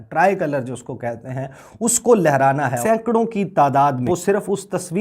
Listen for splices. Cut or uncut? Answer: cut